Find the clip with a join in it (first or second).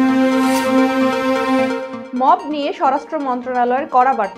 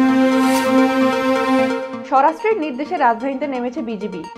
second